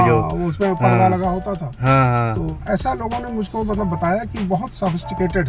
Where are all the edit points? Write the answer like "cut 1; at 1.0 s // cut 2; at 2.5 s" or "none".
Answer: cut 1; at 2.6 s